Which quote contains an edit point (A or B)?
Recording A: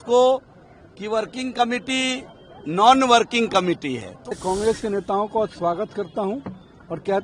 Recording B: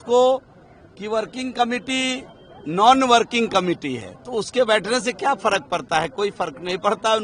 A